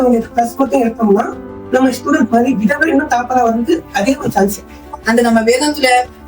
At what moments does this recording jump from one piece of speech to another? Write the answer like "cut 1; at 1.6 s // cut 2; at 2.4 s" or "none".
cut 1; at 5.0 s